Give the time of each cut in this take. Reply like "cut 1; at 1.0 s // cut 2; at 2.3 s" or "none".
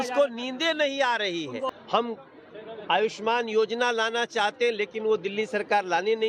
cut 1; at 1.7 s